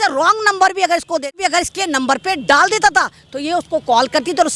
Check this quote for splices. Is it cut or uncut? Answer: cut